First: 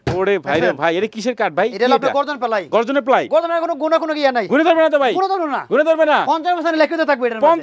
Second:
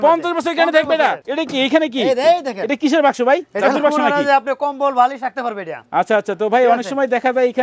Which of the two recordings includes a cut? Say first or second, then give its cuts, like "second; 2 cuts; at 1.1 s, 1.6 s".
second; 1 cut; at 1.2 s